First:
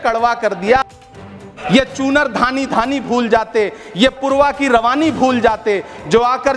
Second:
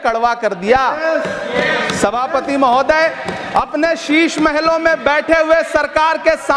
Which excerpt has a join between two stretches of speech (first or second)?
first